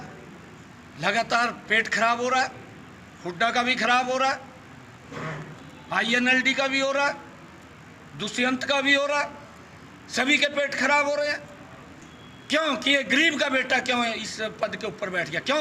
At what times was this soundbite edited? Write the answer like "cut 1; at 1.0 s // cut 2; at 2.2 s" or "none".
none